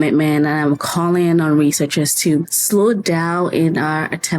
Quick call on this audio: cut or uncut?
cut